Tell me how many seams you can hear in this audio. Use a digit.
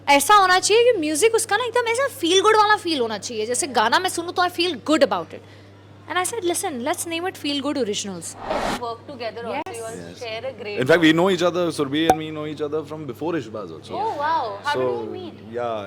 1